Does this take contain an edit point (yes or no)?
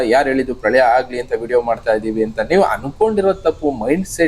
no